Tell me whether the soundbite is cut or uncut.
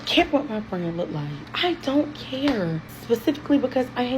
cut